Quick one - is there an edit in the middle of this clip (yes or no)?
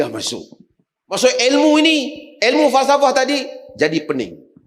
yes